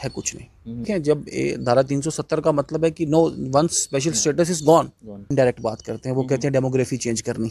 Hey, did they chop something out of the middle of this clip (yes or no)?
yes